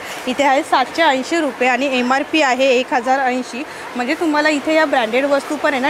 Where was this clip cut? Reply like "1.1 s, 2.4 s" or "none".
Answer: none